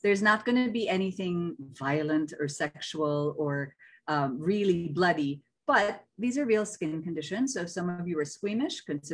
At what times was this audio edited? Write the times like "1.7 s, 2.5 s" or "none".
none